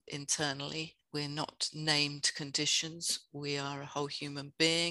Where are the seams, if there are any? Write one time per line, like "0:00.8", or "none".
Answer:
0:01.0

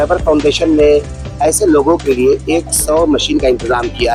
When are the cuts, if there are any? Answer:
none

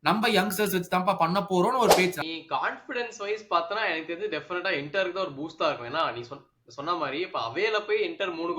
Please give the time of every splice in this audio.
0:02.2

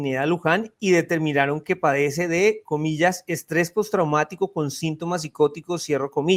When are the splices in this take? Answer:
none

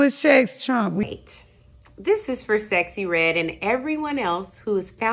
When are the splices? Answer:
0:01.0

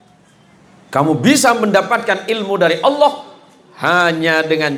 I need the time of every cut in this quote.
none

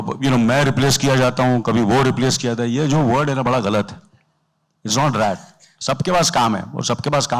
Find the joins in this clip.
none

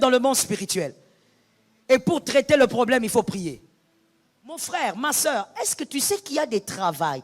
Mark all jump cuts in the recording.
0:04.6

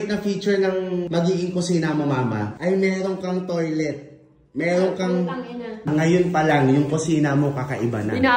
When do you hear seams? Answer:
0:01.1
0:02.5
0:05.9

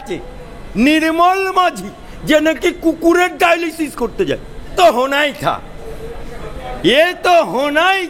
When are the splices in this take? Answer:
0:04.7

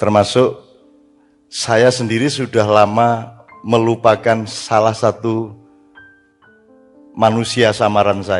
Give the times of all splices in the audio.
0:05.5
0:07.1

